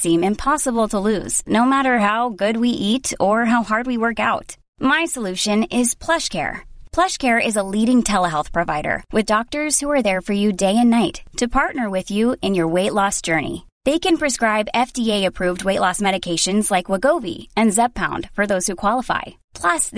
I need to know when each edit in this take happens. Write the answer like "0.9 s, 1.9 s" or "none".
none